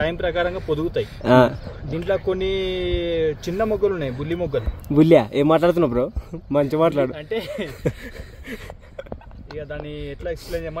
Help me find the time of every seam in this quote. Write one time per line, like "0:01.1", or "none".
none

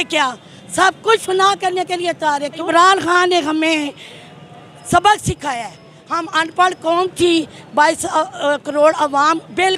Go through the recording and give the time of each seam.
0:02.6

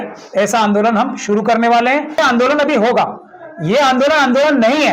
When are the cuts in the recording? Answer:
0:02.2

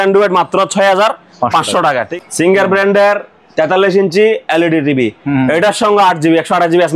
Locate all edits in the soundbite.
0:02.1

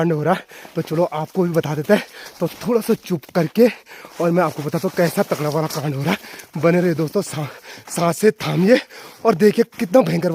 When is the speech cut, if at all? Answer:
none

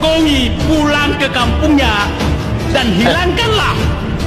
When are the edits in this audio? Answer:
none

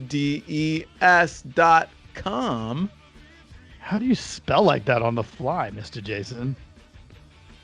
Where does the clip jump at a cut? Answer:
0:06.6

